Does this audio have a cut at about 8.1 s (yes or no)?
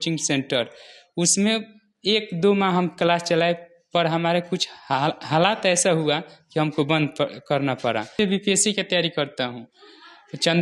yes